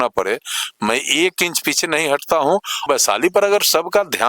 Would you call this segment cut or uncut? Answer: cut